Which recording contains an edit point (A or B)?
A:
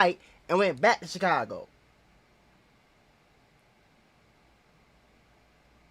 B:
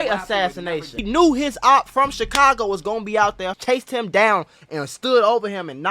B